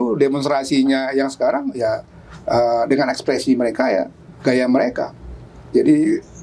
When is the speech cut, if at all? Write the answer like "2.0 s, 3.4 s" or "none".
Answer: none